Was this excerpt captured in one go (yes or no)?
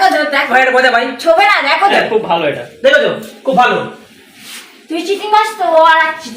no